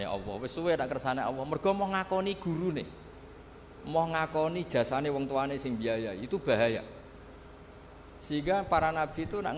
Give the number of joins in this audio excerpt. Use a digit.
0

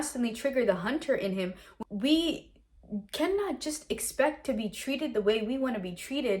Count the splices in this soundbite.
1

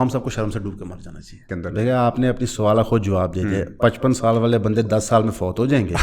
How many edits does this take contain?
1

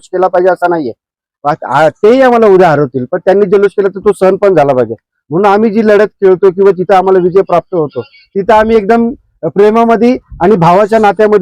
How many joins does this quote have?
0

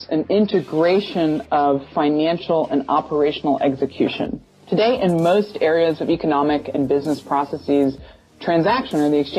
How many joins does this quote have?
1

